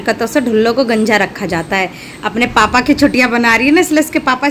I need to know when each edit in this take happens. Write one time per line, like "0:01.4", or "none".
none